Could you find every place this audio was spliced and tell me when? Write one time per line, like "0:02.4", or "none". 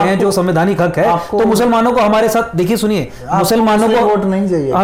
none